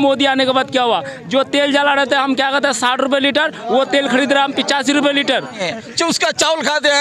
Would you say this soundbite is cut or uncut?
cut